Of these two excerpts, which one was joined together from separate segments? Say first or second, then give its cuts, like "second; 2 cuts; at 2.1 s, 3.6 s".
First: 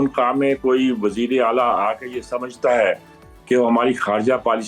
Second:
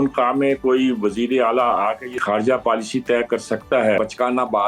second; 2 cuts; at 2.2 s, 4.0 s